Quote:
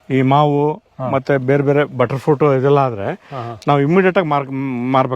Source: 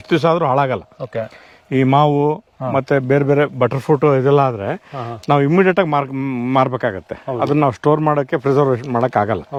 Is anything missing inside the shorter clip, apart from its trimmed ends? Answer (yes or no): no